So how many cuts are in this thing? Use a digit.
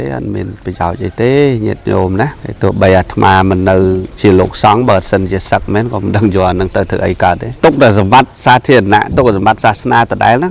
3